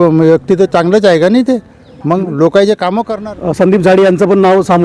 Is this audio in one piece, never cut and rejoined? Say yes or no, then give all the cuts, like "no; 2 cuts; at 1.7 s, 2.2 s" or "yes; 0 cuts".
no; 1 cut; at 3.1 s